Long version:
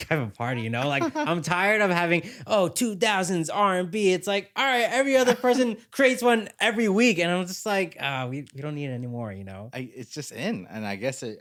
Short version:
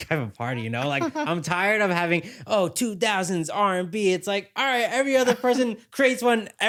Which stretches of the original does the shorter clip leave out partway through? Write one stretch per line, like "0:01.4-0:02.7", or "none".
none